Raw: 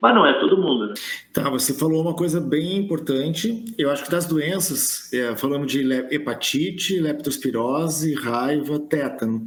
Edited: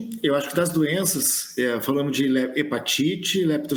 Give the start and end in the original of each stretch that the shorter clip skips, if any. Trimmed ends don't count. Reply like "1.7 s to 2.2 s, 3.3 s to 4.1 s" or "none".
none

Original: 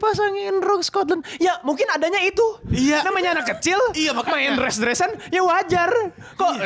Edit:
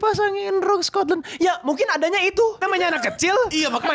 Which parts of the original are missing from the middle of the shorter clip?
2.6 s to 3.0 s

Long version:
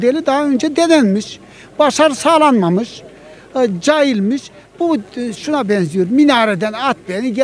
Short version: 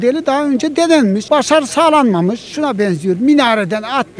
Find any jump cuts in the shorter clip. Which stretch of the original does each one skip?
1.2 s to 1.7 s, 3.0 s to 5.4 s

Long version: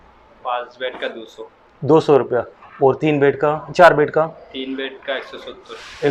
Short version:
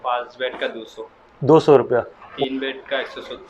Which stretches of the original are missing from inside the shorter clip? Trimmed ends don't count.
2.7 s to 4.4 s

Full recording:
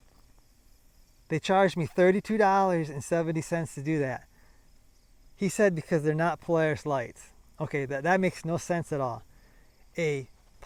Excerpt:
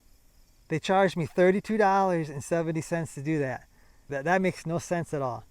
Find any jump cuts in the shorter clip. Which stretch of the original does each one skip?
4.7 s to 7.9 s

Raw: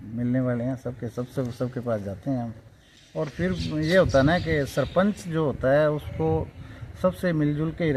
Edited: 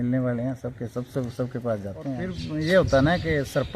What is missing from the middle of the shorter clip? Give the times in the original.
2.5 s to 3.5 s

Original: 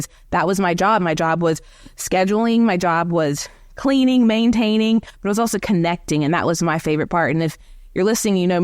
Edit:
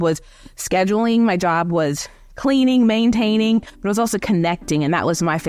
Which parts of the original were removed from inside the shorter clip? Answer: none

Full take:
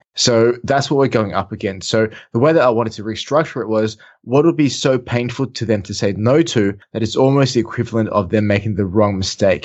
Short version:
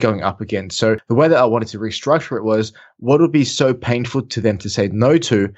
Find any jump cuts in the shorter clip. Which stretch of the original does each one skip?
2.1 s to 2.3 s

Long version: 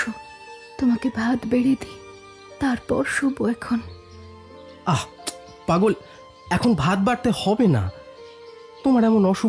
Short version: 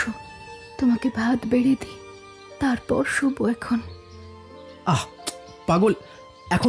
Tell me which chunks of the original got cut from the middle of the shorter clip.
none

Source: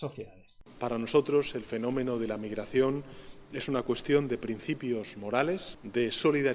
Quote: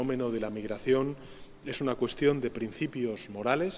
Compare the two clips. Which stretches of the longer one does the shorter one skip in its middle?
none

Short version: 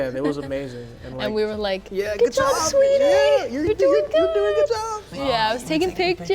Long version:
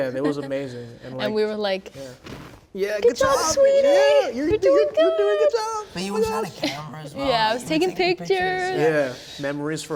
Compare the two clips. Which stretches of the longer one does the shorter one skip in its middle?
1.9 s to 2.7 s, 5.9 s to 7.0 s

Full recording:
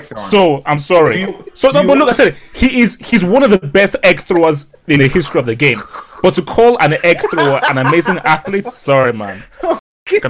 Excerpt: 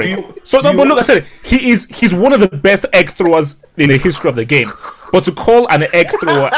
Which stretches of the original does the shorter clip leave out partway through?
none

